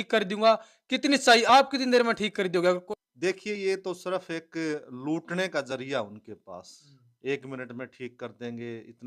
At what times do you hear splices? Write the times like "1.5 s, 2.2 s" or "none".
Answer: 2.8 s